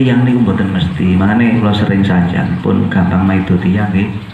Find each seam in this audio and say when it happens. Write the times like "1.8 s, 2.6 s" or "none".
1.6 s

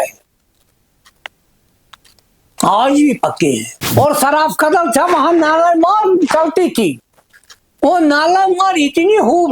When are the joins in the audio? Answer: 3.7 s

